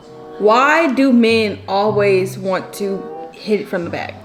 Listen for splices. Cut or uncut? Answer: uncut